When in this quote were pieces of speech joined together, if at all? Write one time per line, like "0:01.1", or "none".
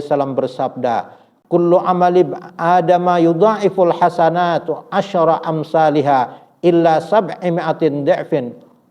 none